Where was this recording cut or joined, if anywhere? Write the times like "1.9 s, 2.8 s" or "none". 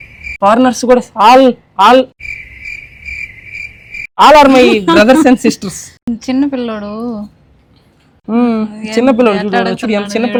none